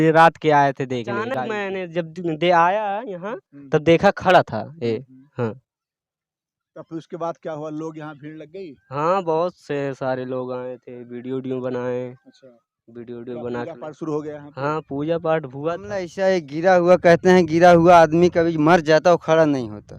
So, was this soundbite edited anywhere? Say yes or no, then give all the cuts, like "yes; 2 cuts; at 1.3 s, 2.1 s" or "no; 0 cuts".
yes; 2 cuts; at 1.5 s, 16.1 s